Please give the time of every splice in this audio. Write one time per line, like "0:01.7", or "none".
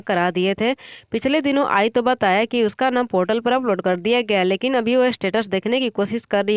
none

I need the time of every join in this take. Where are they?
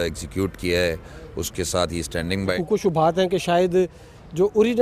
0:02.6

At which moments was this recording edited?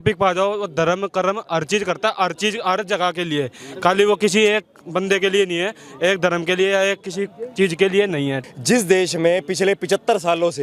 0:08.4

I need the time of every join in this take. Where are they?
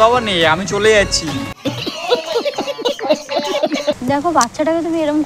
0:04.0

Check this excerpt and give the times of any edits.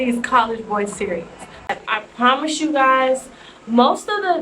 0:01.7

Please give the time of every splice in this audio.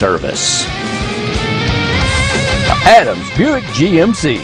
none

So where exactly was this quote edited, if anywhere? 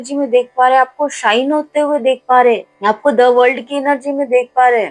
none

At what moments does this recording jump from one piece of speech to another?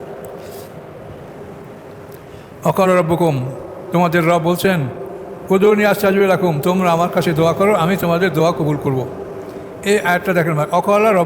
0:01.3

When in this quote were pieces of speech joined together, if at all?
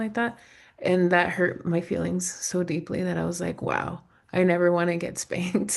none

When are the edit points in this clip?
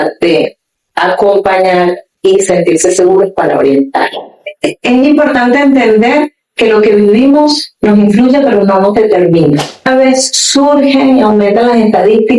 0:04.4
0:09.9

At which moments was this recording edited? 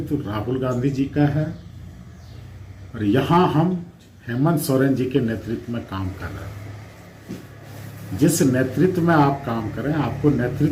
none

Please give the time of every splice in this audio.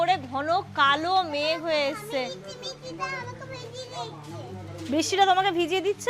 none

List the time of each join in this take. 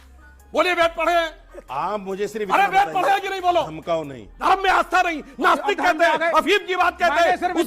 0:04.3

